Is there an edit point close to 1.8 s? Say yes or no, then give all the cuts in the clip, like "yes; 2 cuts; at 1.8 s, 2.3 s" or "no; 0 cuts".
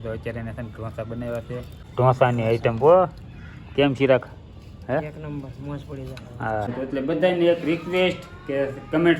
yes; 2 cuts; at 1.8 s, 6.7 s